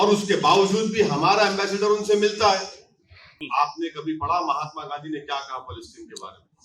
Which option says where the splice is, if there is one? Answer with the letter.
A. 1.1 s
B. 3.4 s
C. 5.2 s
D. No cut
B